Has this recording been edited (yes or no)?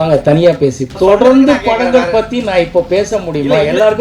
yes